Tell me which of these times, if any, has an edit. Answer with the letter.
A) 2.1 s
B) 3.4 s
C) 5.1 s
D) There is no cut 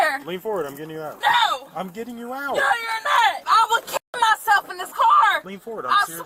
B